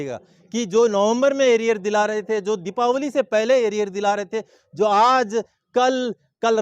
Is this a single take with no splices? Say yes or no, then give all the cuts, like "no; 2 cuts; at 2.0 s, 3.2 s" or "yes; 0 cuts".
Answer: yes; 0 cuts